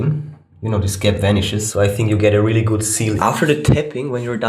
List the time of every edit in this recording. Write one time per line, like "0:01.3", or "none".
0:01.7
0:03.2